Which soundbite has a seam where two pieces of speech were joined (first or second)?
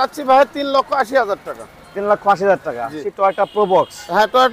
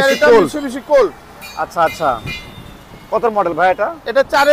first